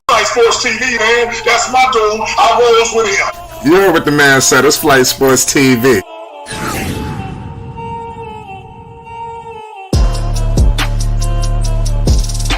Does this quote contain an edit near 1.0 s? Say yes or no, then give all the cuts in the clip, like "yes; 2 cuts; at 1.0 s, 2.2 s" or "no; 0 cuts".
yes; 1 cut; at 1.0 s